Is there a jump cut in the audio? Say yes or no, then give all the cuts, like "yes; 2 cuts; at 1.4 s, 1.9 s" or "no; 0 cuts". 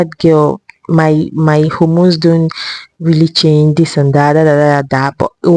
no; 0 cuts